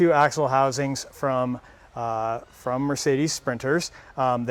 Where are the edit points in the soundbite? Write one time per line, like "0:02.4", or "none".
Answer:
none